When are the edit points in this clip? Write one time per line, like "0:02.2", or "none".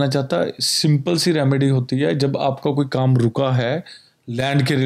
none